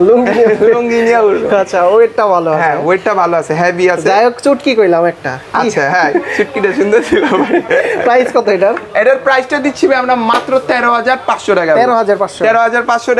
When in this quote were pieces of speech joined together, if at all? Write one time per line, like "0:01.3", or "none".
none

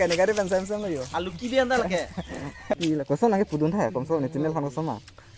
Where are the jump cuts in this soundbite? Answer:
0:02.7

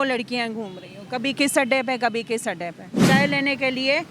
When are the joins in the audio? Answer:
0:03.0

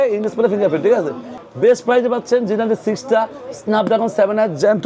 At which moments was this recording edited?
0:01.4

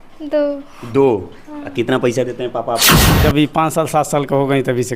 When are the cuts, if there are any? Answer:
0:03.2

